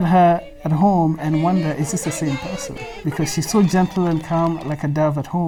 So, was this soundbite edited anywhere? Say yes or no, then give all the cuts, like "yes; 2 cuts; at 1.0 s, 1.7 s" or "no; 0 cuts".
no; 0 cuts